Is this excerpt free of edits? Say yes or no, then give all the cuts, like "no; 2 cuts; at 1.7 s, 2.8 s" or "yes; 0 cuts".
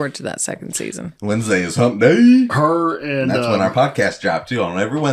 no; 1 cut; at 1.2 s